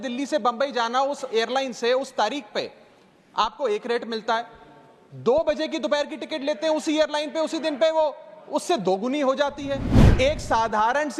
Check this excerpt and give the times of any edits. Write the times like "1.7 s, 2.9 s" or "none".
10.0 s